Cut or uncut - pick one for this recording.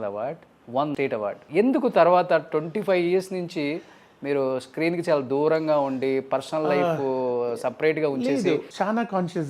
cut